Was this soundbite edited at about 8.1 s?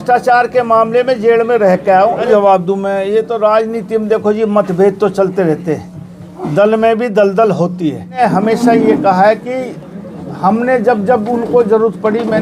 yes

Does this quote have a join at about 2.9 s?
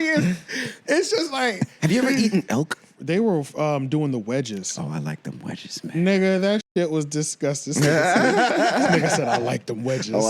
yes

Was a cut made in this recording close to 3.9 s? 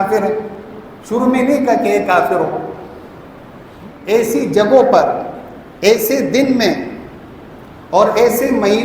yes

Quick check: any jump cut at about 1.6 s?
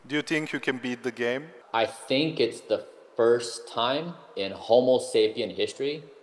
yes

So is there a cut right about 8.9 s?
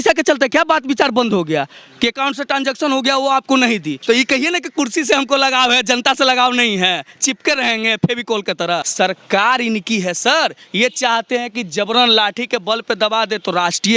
yes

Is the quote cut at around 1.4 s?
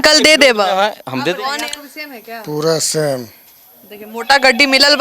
yes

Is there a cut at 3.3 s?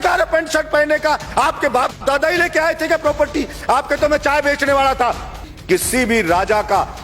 no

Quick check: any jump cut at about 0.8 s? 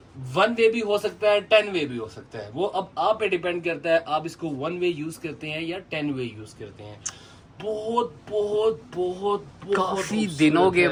no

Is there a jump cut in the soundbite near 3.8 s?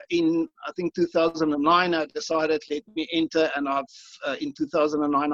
no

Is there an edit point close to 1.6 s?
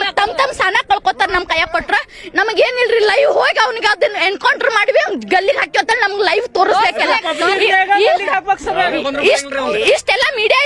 no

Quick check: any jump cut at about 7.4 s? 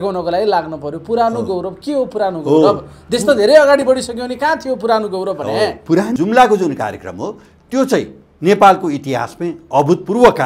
no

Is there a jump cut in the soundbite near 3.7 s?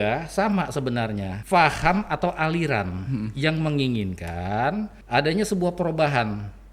no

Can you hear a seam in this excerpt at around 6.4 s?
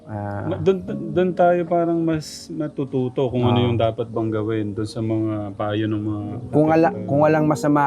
no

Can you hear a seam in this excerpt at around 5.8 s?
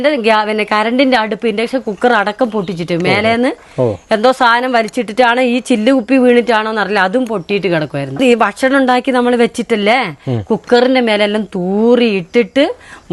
no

